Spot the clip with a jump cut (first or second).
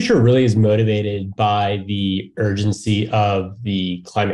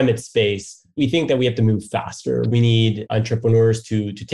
second